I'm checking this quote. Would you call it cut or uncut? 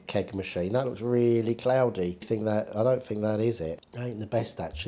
cut